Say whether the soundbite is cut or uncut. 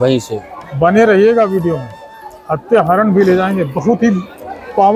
uncut